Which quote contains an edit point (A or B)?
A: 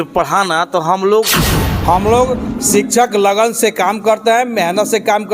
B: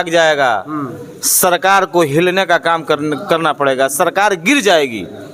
A